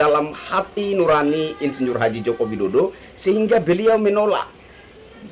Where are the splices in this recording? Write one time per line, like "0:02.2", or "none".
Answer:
none

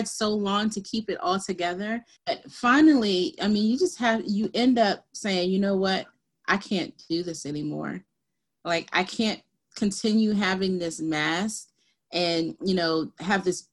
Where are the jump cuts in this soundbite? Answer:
0:02.1

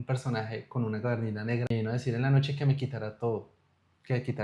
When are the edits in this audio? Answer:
0:01.7

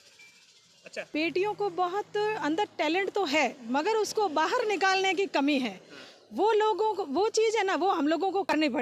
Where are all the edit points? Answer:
0:01.1

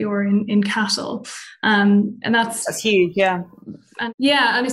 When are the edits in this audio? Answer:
none

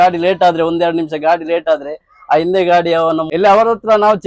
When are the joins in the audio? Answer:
0:03.3

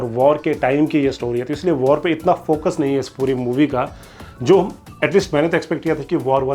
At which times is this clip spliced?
none

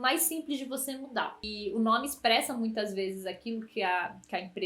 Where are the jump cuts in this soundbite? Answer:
0:01.5

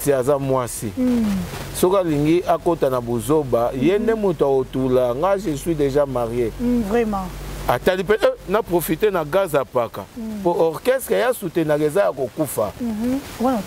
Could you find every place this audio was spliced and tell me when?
0:06.8

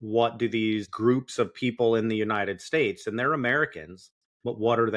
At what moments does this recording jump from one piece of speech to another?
0:00.9

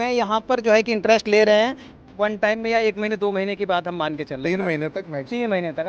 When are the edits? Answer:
0:01.9

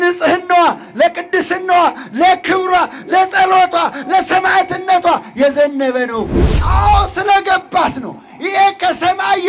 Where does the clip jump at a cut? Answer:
0:06.5

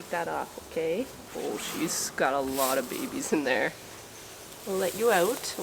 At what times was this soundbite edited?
none

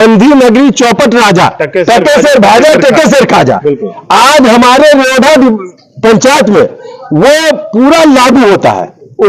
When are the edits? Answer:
none

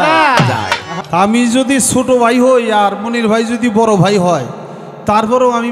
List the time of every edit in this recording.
0:00.9

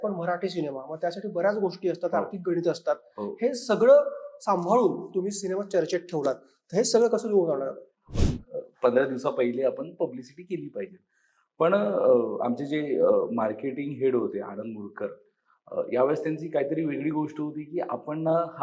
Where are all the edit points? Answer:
0:08.0

